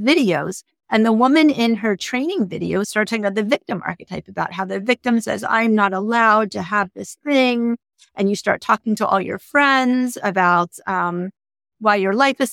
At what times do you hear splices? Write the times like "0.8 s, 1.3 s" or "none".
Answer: 2.9 s

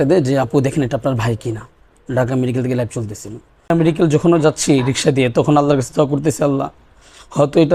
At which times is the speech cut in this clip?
3.7 s

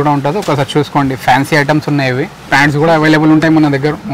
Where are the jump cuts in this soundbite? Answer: 2.4 s

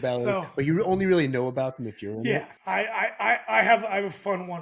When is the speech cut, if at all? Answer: 2.2 s

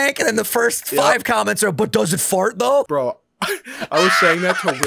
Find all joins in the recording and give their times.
2.9 s

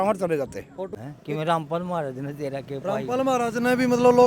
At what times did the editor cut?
0.9 s

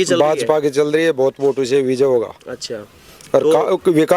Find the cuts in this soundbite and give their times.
none

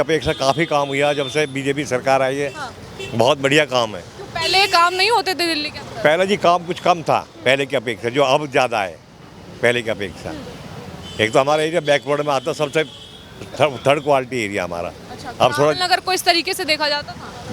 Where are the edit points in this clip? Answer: none

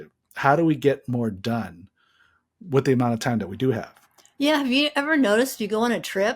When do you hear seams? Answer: none

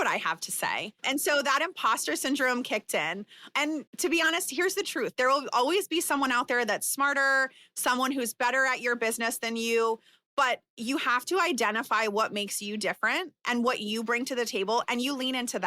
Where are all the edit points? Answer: 0.9 s, 2.7 s, 3.9 s

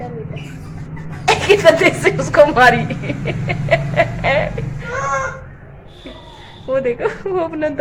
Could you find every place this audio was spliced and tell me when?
none

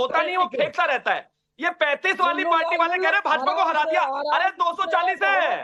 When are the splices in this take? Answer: none

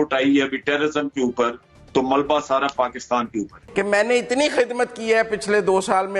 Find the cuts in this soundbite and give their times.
3.6 s

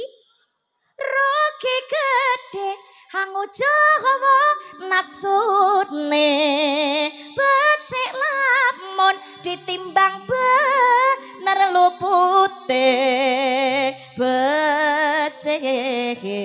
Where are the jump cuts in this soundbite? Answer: none

